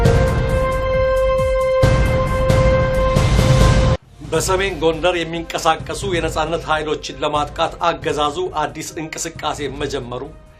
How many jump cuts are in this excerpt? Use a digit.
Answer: 1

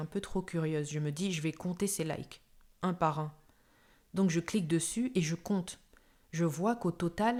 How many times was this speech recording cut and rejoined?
0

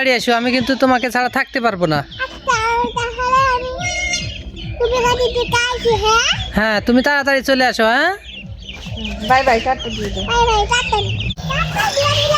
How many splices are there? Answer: 1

